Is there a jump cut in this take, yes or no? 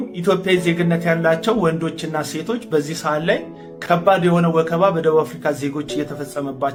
no